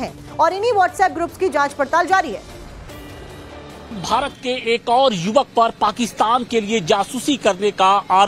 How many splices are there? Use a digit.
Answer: 1